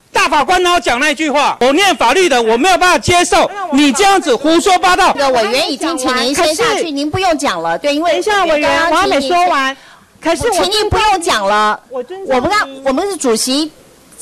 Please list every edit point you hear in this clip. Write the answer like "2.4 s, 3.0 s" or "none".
1.6 s, 5.2 s